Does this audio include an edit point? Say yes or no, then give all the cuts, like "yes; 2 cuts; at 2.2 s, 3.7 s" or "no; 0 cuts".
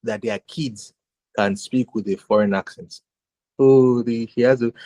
no; 0 cuts